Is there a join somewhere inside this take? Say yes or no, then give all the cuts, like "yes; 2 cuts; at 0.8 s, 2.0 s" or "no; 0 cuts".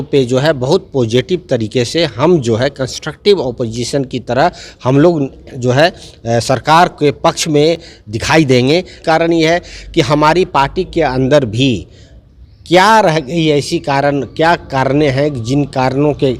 yes; 1 cut; at 9.0 s